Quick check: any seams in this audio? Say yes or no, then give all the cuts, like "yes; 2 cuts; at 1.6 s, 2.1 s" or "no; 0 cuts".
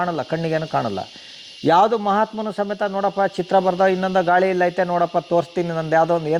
no; 0 cuts